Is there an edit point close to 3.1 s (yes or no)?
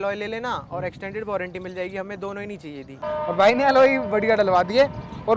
yes